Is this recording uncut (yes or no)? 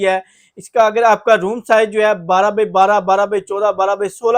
yes